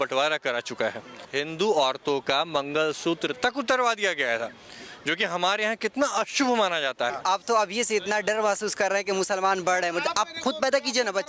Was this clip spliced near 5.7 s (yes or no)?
no